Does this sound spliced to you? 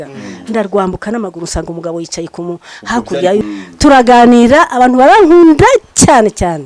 yes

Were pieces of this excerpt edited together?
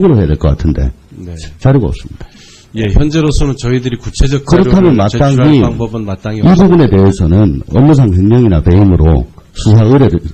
no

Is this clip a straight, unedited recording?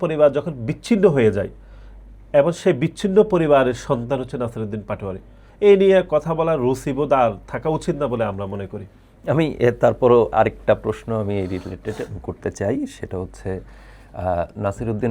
yes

